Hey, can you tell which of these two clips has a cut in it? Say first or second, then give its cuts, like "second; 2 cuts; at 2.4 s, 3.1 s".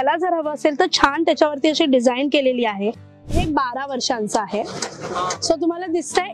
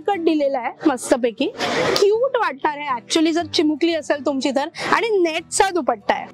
first; 1 cut; at 3.3 s